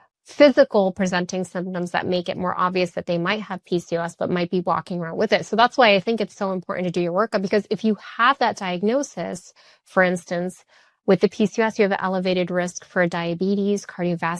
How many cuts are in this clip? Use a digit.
0